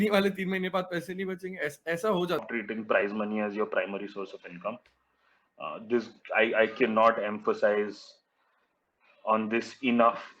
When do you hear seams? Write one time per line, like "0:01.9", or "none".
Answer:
0:02.5